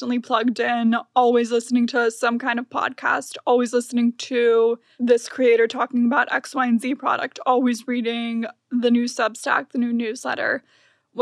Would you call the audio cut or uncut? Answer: cut